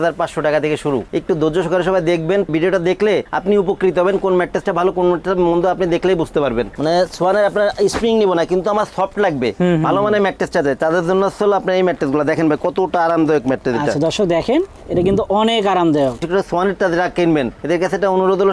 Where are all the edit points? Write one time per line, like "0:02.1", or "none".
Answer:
0:01.1
0:06.7
0:16.2